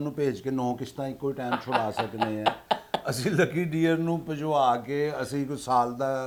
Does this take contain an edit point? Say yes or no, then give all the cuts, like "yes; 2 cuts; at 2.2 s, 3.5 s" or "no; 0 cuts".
no; 0 cuts